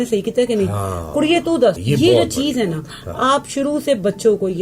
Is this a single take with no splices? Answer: no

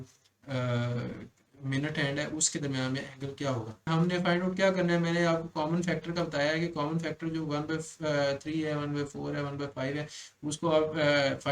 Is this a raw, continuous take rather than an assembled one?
no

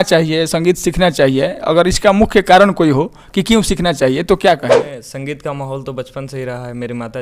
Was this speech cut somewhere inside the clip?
yes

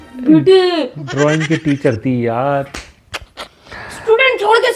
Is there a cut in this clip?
yes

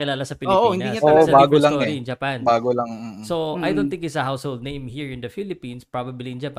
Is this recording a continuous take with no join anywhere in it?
yes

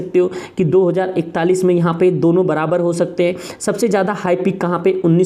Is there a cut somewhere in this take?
no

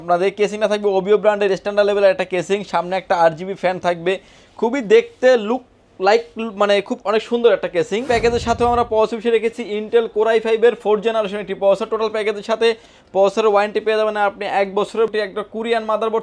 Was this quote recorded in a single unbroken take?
no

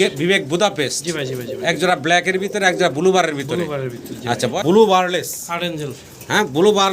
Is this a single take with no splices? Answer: no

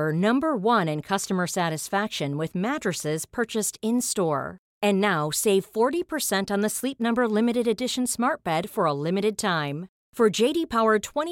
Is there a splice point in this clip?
no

